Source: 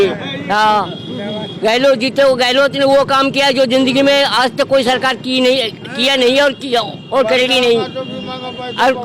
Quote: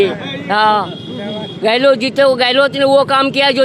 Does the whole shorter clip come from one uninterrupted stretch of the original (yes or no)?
yes